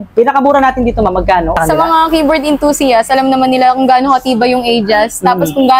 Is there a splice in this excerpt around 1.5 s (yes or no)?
yes